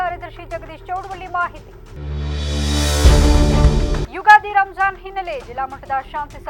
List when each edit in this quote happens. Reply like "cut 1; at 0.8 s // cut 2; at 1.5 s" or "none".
none